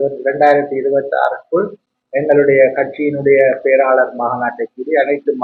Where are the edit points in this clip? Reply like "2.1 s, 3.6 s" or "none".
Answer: none